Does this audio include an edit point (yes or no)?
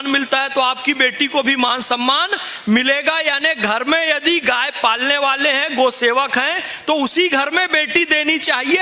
no